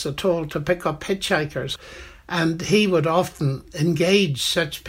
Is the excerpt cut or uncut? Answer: cut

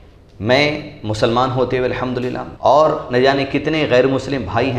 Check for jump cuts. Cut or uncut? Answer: cut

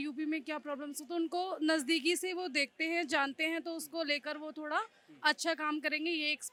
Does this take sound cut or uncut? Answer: uncut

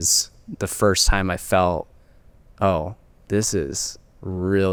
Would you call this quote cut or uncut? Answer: uncut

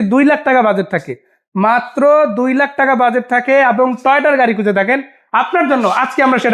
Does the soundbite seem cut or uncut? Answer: uncut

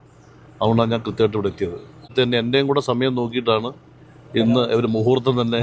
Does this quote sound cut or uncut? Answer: cut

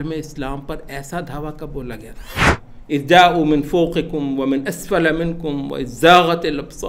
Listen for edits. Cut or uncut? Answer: cut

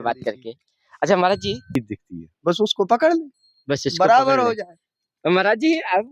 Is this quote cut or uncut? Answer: cut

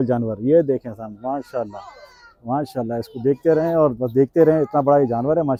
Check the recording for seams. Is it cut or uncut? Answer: uncut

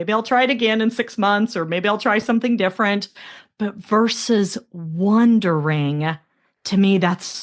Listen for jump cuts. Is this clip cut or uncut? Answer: uncut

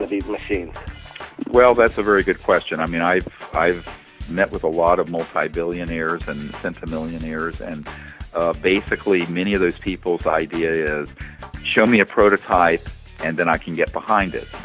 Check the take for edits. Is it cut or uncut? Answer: cut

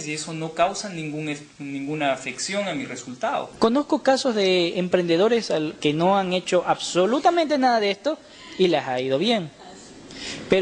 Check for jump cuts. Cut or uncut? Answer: cut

